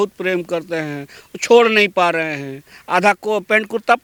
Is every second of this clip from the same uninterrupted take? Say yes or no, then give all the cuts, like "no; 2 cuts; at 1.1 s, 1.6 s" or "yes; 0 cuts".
yes; 0 cuts